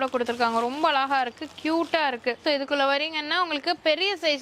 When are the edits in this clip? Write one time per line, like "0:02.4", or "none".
0:02.4

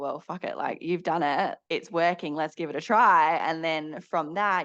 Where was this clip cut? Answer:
0:01.6

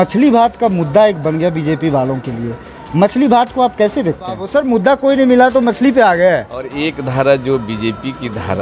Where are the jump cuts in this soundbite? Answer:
0:04.4
0:06.7

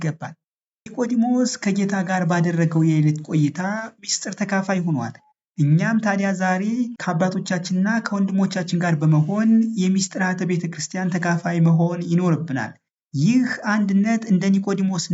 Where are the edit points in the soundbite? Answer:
0:07.0

